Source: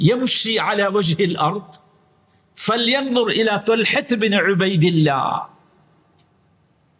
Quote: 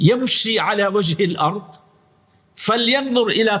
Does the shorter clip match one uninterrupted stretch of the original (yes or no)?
yes